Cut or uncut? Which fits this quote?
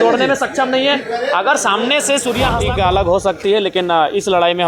cut